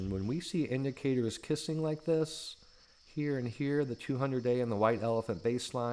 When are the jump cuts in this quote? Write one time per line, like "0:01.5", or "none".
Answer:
none